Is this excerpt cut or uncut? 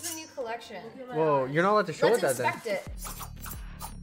cut